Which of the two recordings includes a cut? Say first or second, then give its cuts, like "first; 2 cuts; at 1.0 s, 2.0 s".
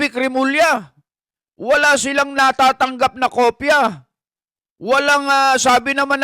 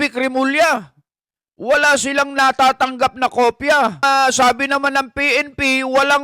second; 1 cut; at 4.0 s